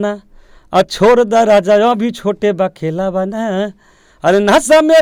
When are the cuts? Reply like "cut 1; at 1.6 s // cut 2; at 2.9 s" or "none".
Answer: none